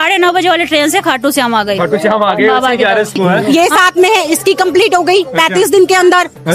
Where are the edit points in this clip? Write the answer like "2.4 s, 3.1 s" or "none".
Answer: 3.4 s